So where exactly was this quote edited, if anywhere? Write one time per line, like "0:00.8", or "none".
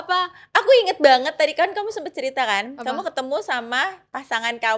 none